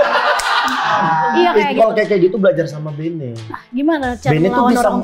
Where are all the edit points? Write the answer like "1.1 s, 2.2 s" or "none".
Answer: 0.9 s